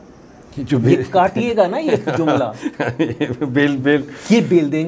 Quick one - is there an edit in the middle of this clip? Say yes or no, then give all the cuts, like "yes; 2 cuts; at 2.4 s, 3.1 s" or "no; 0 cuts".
no; 0 cuts